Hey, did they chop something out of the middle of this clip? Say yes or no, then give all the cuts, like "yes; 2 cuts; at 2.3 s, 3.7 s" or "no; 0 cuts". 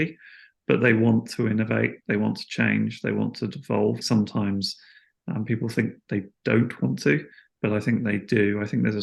yes; 1 cut; at 4.0 s